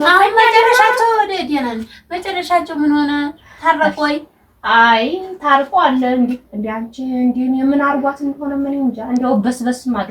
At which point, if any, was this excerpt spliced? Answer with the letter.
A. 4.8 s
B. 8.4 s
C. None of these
C